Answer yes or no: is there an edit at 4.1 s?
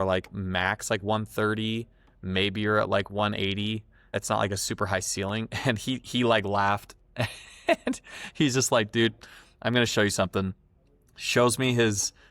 yes